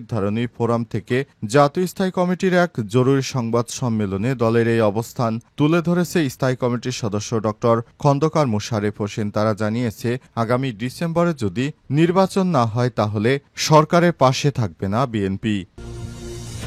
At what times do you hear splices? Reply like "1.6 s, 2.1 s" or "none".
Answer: 15.7 s

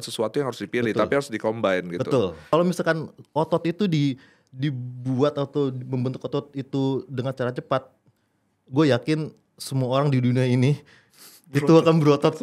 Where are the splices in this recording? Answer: 2.5 s

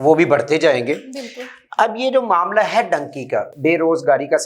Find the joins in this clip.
3.5 s

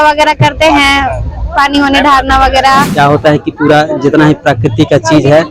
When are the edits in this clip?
2.9 s

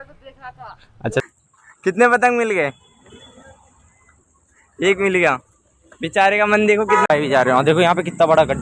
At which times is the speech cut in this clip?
1.2 s, 7.1 s

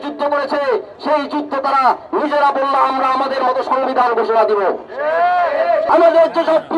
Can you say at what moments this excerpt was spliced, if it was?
5.8 s

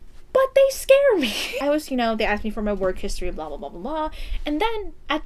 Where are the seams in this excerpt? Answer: 1.5 s

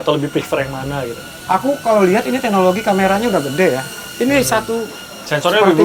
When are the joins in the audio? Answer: none

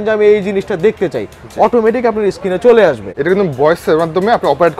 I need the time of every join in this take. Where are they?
3.0 s

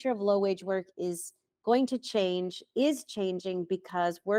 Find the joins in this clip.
none

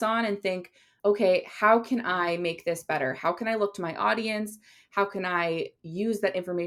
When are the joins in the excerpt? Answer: none

